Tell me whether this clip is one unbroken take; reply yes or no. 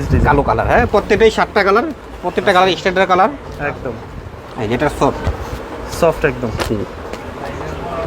yes